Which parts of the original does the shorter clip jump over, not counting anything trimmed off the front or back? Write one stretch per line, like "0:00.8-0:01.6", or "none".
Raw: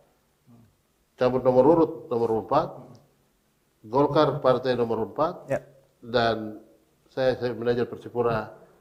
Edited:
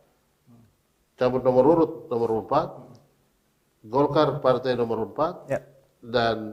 none